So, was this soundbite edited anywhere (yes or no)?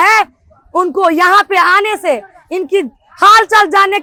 no